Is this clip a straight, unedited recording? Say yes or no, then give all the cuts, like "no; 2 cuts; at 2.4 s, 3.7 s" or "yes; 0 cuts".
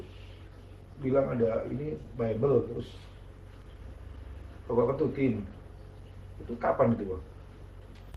yes; 0 cuts